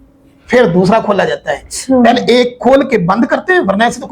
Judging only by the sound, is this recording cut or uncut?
uncut